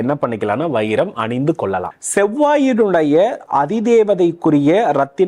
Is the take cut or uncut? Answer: cut